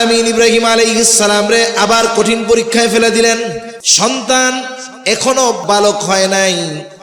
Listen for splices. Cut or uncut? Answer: cut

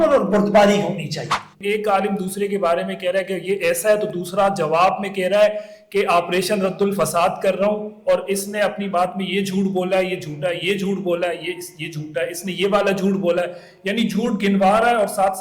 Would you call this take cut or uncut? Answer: cut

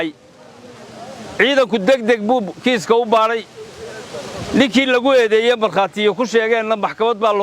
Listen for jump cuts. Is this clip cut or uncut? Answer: uncut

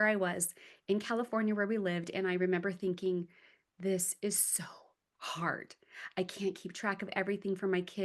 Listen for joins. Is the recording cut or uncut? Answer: uncut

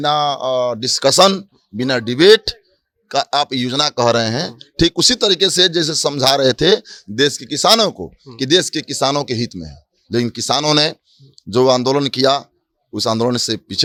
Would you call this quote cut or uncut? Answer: uncut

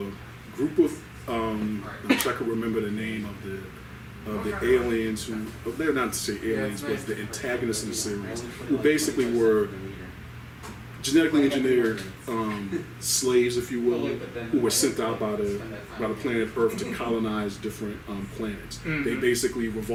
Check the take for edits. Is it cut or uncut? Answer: uncut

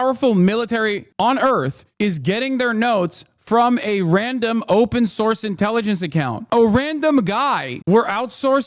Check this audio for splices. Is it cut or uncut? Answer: cut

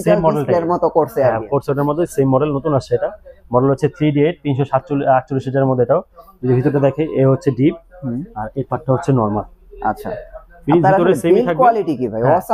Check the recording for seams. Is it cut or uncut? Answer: uncut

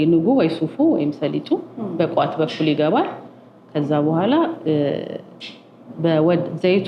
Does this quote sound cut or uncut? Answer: uncut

